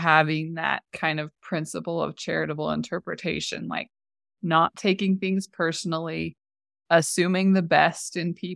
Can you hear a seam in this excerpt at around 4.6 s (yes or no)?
no